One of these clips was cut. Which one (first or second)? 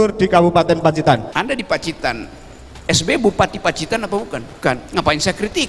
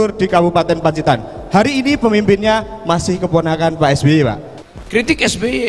first